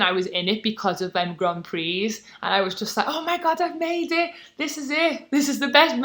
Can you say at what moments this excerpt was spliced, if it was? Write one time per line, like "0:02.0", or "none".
none